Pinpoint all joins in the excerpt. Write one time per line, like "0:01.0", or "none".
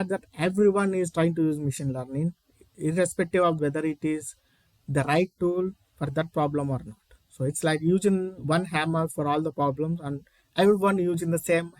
0:03.6